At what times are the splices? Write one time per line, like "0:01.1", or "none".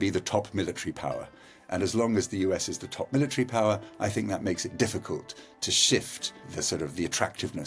0:06.5